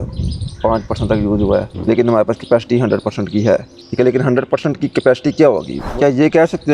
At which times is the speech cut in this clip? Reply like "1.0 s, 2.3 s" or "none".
1.7 s, 3.8 s, 5.8 s